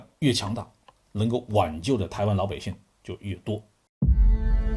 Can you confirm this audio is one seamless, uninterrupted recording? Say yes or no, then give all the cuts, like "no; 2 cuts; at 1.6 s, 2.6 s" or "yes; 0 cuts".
no; 1 cut; at 3.8 s